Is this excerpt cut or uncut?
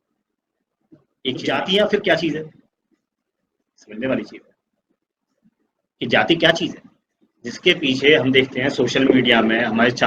cut